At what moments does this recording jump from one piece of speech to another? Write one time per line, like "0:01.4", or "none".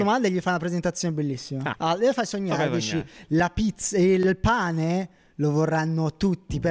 0:01.7